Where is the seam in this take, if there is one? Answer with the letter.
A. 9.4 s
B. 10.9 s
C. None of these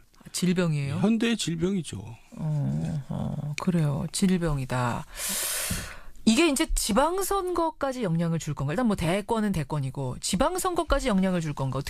A